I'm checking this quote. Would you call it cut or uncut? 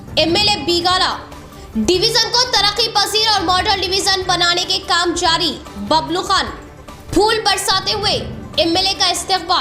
uncut